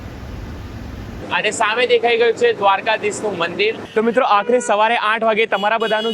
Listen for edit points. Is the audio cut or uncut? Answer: cut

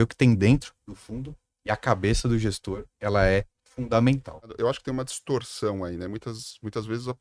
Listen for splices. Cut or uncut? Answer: cut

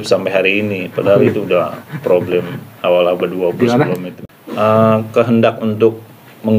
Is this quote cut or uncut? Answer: cut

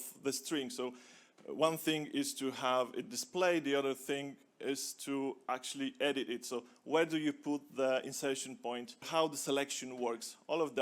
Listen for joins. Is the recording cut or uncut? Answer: cut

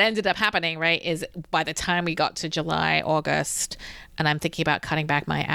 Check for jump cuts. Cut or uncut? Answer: uncut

